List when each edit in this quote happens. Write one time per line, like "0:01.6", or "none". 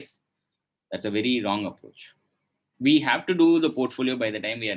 0:02.6